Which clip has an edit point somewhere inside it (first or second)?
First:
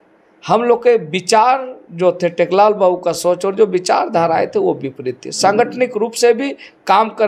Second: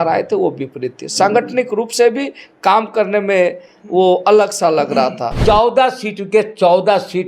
second